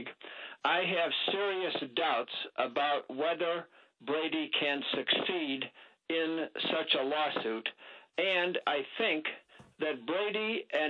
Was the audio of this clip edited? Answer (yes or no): yes